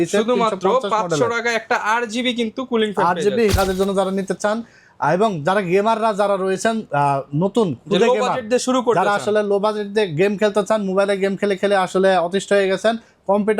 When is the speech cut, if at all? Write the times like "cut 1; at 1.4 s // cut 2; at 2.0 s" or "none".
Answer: cut 1; at 3.5 s